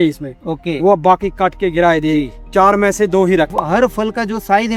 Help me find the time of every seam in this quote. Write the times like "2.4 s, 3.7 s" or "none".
3.5 s